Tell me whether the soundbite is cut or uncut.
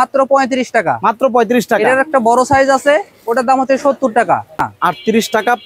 cut